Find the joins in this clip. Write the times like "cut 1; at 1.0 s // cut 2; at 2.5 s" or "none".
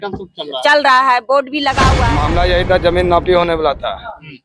cut 1; at 2.1 s